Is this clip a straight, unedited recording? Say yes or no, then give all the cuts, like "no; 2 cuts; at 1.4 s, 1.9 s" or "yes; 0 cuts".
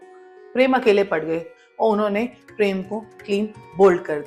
no; 1 cut; at 1.5 s